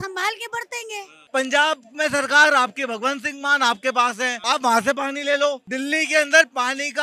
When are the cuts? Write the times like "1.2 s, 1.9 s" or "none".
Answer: 1.1 s, 4.4 s, 5.7 s